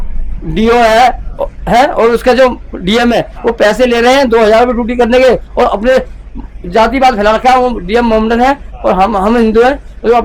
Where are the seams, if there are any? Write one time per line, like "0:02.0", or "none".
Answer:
none